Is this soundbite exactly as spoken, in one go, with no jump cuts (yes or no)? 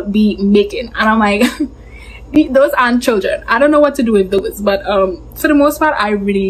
yes